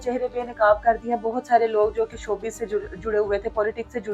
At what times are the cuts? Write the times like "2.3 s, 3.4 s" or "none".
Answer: none